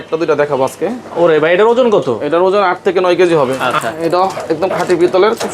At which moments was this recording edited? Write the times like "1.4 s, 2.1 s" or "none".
3.6 s